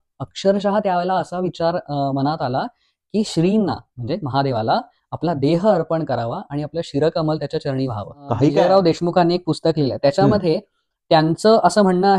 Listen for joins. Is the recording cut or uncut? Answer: cut